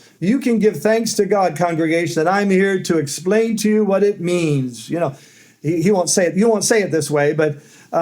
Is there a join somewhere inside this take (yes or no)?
no